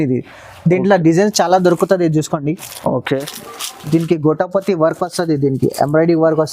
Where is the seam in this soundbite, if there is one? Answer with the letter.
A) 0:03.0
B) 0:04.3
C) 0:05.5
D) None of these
A